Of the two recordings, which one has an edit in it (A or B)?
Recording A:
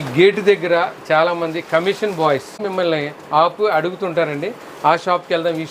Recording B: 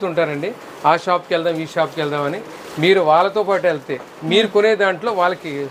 A